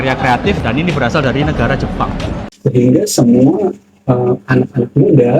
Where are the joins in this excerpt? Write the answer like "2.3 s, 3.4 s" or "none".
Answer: 2.5 s